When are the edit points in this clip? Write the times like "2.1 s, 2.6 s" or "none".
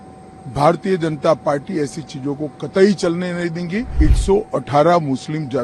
3.9 s